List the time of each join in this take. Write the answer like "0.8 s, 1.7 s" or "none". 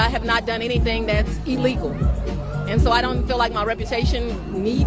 none